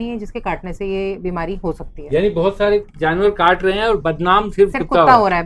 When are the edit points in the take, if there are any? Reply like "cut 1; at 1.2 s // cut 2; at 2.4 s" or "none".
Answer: none